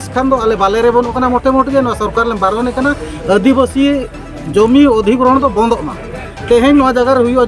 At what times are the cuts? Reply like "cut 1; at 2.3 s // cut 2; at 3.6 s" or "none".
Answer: none